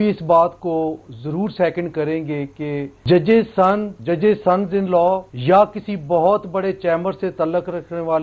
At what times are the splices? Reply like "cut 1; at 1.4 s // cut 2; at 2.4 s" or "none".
cut 1; at 2.9 s // cut 2; at 3.9 s // cut 3; at 5.3 s